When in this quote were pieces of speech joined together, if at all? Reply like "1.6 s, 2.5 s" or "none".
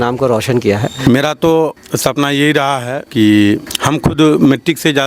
1.0 s, 1.9 s, 3.0 s, 3.7 s